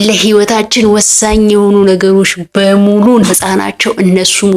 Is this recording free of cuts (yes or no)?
yes